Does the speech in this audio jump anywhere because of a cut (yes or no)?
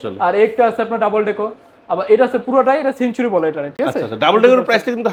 no